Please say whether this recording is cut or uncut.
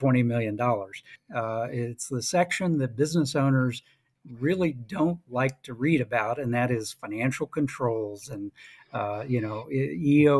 cut